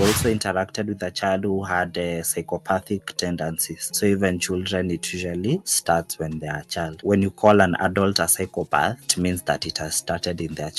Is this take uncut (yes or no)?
yes